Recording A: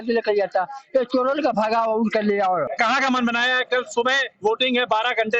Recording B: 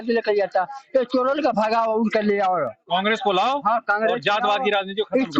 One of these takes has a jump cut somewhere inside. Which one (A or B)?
A